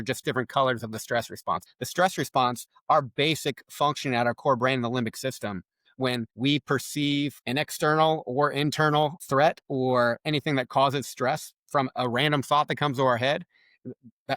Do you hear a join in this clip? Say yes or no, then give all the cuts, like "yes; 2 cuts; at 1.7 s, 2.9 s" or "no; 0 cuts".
yes; 4 cuts; at 1.7 s, 6.3 s, 7.4 s, 9.2 s